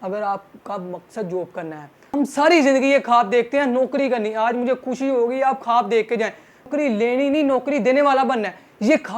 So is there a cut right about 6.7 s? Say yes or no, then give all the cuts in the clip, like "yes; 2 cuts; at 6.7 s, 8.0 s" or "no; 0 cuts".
no; 1 cut; at 2.1 s